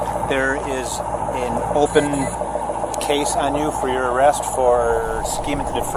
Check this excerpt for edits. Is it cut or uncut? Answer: uncut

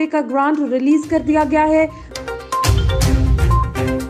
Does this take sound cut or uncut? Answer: cut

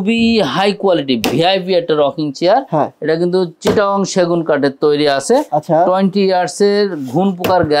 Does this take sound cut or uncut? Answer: uncut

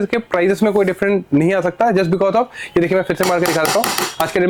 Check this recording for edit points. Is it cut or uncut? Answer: uncut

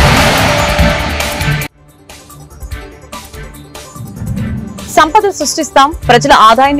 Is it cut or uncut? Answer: uncut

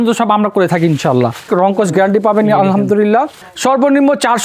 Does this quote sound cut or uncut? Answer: cut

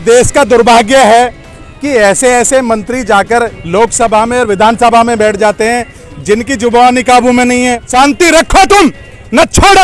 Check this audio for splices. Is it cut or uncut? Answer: cut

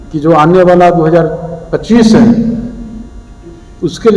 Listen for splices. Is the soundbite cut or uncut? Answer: uncut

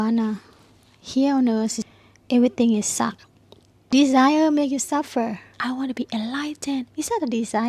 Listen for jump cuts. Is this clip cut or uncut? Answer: cut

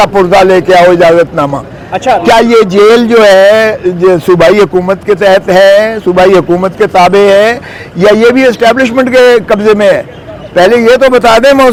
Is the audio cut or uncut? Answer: uncut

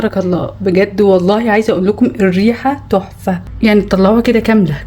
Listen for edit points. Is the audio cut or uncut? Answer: cut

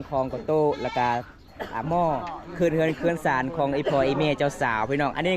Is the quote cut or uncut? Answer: uncut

